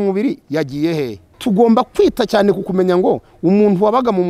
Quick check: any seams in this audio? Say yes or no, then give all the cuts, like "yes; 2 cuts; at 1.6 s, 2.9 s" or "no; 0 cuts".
yes; 1 cut; at 1.4 s